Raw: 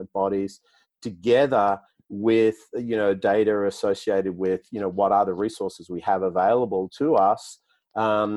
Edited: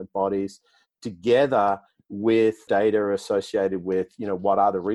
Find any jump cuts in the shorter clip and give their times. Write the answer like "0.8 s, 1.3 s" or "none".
2.6 s